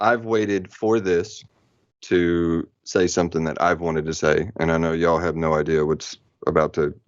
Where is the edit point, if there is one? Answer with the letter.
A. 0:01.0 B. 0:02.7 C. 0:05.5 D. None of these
D